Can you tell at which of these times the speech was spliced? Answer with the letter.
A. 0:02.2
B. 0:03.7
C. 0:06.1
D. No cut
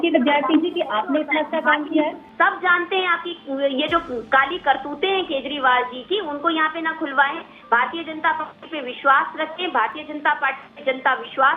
A